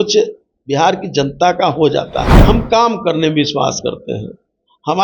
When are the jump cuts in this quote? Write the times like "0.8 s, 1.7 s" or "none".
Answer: 2.3 s